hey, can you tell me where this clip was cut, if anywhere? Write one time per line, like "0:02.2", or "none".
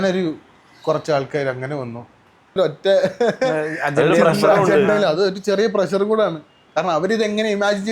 0:02.6

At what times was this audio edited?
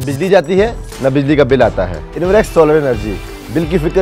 0:02.0

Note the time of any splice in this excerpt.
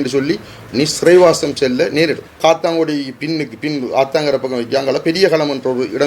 0:02.4

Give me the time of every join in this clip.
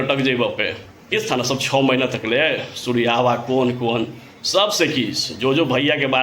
0:01.1

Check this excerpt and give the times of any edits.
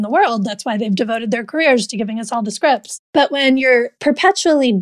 0:03.0
0:03.9

